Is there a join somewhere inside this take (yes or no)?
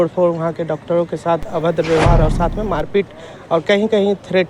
no